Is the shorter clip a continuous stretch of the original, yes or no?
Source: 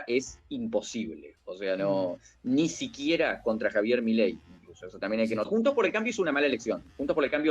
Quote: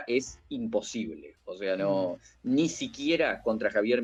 yes